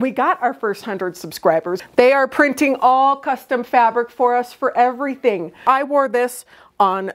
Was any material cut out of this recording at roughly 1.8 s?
yes; 2 cuts; at 1.8 s, 5.6 s

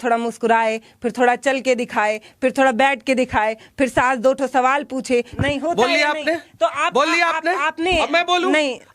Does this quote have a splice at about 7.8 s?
no; 1 cut; at 5.3 s

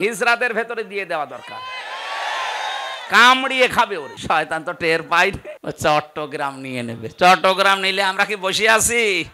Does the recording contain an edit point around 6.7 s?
no; 2 cuts; at 4.1 s, 5.5 s

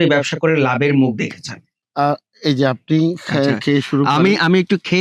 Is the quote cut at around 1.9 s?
yes; 1 cut; at 1.9 s

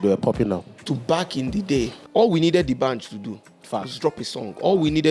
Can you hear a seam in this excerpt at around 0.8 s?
yes; 2 cuts; at 0.8 s, 2.0 s

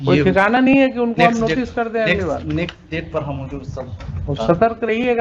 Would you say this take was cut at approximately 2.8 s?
no; 0 cuts

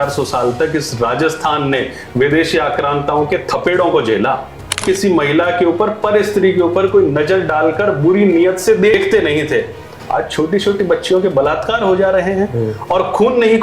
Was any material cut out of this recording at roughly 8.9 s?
yes; 2 cuts; at 4.8 s, 8.9 s

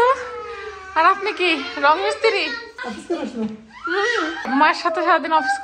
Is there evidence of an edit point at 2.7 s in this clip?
yes; 2 cuts; at 2.7 s, 4.5 s

